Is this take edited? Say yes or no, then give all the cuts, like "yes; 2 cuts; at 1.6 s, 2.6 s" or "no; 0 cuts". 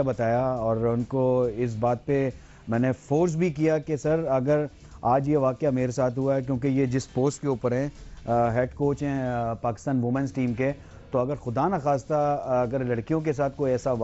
yes; 1 cut; at 10.5 s